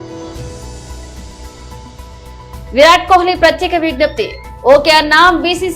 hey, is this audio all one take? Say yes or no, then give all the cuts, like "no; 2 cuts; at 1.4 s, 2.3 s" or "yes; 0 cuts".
no; 1 cut; at 2.2 s